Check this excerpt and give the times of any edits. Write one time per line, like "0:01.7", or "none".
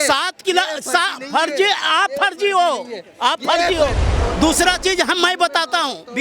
0:04.1